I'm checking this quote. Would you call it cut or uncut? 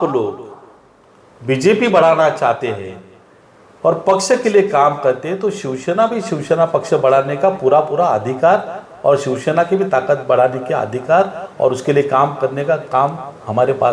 uncut